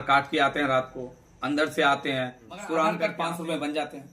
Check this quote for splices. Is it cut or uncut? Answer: cut